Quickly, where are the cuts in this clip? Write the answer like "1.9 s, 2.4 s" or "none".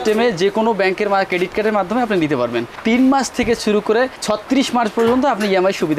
2.7 s